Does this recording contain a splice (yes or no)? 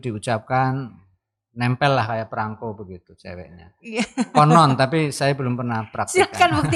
no